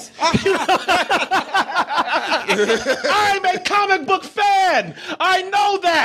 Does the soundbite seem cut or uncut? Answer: uncut